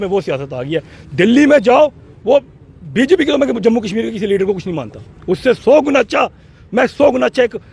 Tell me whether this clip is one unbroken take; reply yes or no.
yes